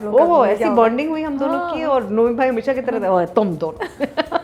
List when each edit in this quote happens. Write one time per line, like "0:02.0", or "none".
none